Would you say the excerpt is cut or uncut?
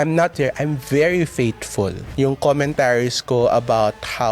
cut